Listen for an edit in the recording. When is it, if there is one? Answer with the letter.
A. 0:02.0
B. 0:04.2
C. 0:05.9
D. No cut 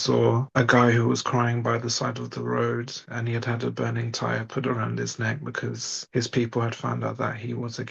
C